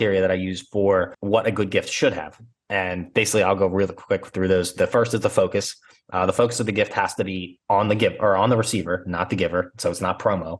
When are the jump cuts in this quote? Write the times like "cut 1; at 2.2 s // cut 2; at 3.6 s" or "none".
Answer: cut 1; at 1.2 s